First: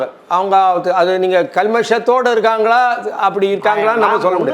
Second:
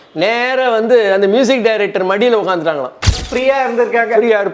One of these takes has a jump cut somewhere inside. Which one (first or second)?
second